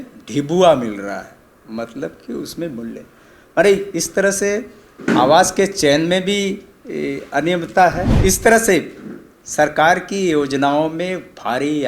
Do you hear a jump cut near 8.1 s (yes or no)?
yes